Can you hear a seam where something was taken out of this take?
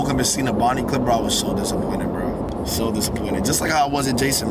no; 0 cuts

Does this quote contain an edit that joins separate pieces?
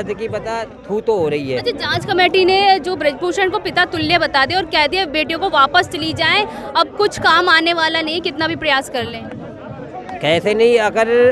no; 0 cuts

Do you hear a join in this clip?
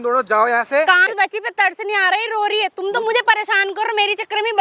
yes; 1 cut; at 1.1 s

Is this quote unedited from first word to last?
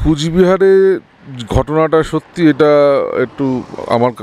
yes; 0 cuts

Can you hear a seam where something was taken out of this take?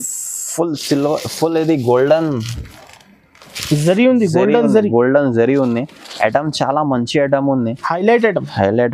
no; 0 cuts

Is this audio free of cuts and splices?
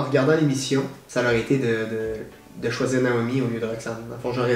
yes; 0 cuts

